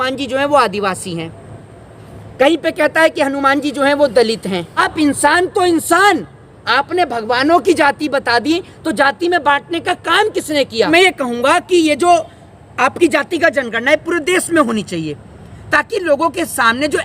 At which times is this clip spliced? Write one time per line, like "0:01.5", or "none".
0:04.8
0:10.9

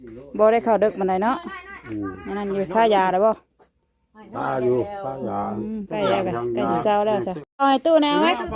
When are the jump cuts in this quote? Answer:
0:07.6

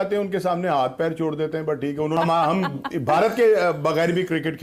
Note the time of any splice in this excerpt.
0:02.2

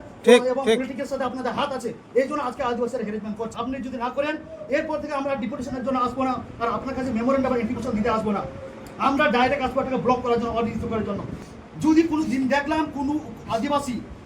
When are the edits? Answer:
0:03.5
0:11.3

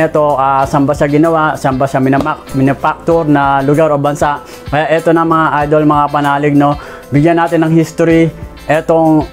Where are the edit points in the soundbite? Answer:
none

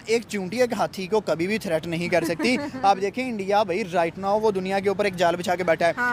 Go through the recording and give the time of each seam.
none

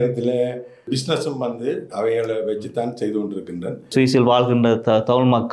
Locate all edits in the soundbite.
0:03.8

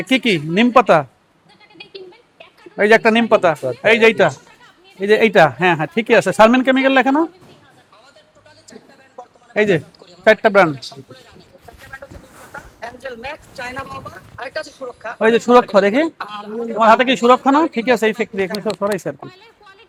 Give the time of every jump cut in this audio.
none

